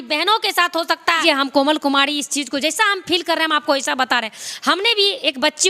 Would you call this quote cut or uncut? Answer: cut